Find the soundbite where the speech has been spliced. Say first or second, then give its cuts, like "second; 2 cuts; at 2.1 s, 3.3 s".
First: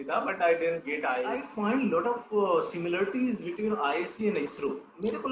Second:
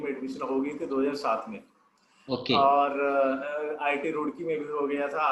first; 1 cut; at 1.2 s